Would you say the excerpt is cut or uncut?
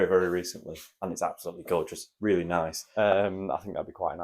cut